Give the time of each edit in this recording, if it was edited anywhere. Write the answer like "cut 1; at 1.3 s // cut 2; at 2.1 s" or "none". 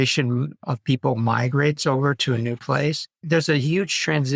cut 1; at 3.1 s